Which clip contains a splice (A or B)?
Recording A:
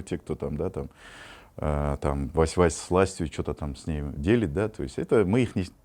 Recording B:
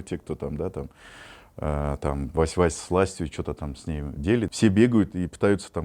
B